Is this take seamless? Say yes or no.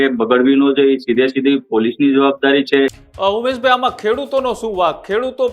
no